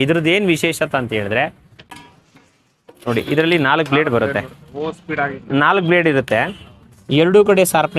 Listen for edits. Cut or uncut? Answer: cut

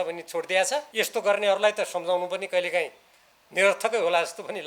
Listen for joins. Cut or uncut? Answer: cut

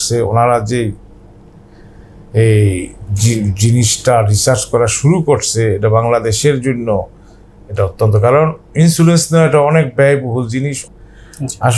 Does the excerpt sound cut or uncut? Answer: cut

